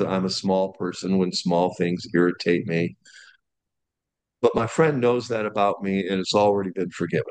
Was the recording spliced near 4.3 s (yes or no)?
no